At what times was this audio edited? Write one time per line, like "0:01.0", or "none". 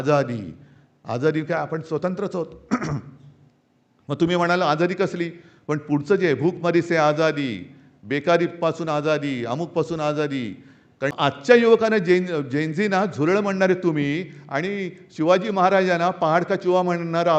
0:11.1